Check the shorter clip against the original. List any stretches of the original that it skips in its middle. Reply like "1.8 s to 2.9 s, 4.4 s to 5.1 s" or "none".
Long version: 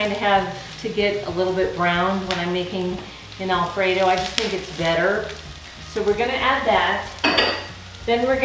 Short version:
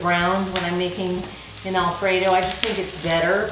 none